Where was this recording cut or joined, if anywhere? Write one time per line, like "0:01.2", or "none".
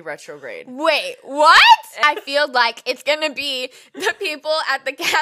0:02.0